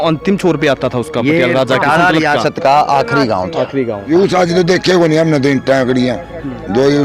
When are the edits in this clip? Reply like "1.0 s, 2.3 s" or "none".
4.1 s